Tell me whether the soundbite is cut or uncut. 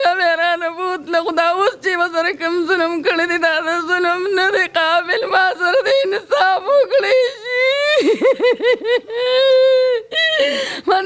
uncut